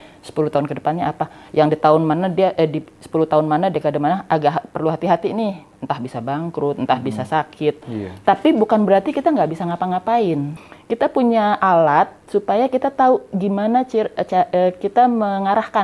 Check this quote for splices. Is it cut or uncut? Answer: cut